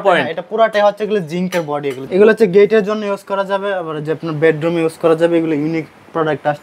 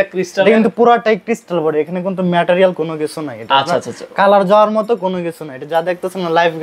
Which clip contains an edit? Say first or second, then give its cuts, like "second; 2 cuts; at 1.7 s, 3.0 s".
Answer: first; 1 cut; at 2.1 s